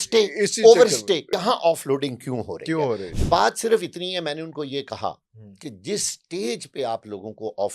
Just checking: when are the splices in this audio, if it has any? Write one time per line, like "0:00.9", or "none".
0:01.2
0:03.1

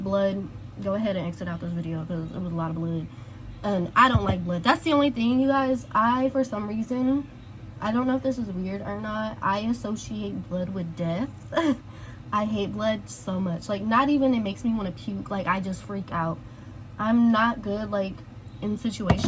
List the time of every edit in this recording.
none

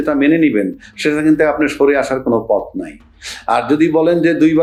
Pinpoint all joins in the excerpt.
none

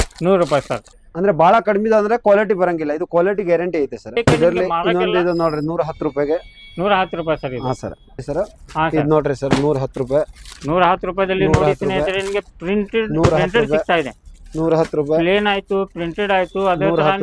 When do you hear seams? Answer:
0:01.0
0:04.1
0:08.2

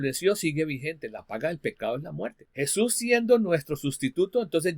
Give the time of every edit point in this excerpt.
0:02.4

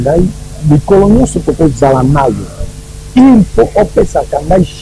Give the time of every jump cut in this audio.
none

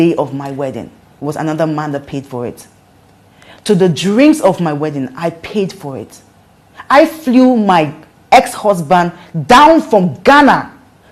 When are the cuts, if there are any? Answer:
none

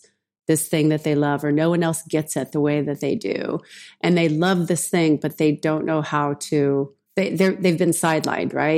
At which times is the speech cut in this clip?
0:07.0

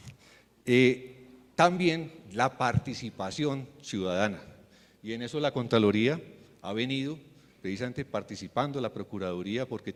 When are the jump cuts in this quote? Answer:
none

